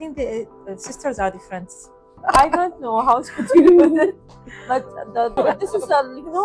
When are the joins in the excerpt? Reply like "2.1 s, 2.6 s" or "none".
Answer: 2.1 s, 5.4 s